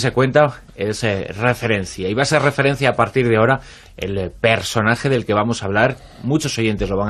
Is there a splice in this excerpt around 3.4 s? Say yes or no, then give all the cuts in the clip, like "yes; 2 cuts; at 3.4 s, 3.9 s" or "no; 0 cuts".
yes; 1 cut; at 3.4 s